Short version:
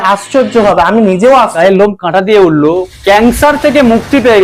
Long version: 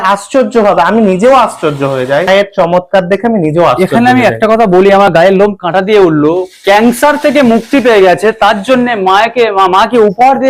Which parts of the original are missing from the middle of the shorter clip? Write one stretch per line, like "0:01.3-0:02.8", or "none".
0:01.6-0:05.2